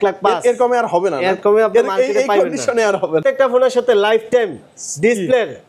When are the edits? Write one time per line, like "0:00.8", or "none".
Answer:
0:03.2